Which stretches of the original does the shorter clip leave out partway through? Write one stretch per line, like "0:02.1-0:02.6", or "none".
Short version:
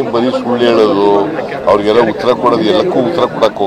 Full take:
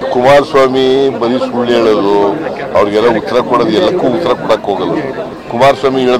none